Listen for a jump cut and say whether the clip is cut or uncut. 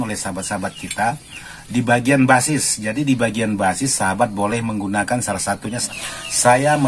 cut